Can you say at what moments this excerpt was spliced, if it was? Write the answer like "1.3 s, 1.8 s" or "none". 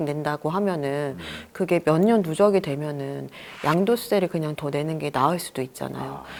none

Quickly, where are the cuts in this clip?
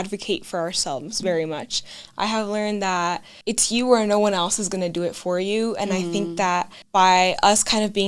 3.3 s, 6.8 s

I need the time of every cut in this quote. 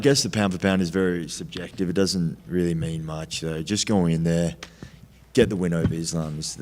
none

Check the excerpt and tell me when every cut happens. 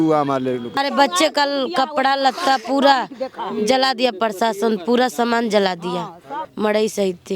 0.9 s, 6.3 s

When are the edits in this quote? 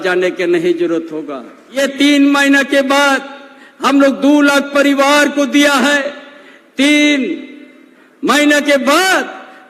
1.8 s

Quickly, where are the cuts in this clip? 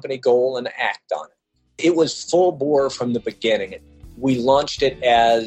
1.7 s, 4.0 s

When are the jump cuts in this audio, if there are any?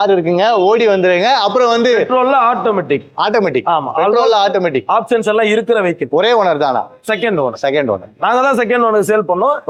none

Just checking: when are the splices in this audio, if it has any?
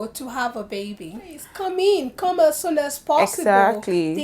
1.5 s

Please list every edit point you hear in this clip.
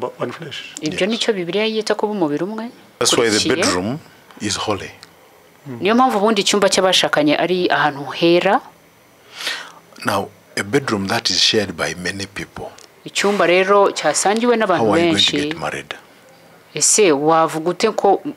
3.0 s

